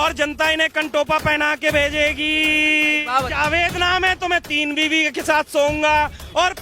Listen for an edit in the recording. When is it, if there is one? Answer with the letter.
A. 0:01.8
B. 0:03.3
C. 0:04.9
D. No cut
B